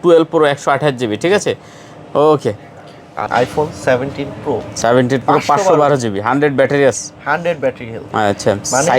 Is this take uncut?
no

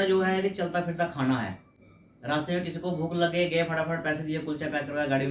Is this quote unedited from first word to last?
yes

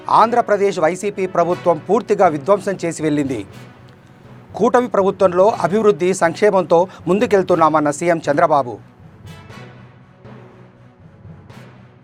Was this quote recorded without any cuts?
yes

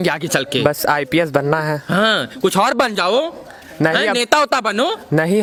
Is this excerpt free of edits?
yes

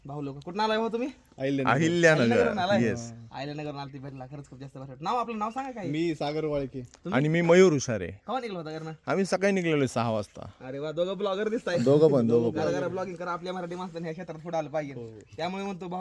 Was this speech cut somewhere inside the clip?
no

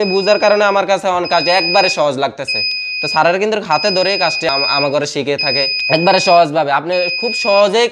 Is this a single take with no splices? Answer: no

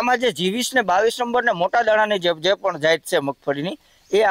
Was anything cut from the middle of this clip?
no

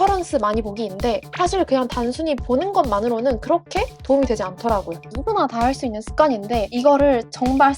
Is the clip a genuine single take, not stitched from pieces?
no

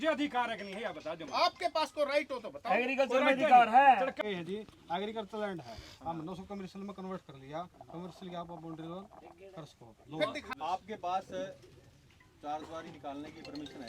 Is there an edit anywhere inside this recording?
yes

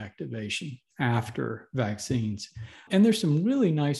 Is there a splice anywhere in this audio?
yes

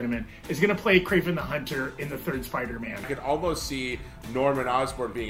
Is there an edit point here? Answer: yes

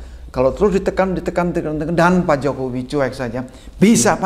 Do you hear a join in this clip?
no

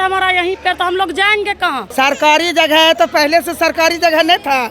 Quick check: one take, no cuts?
no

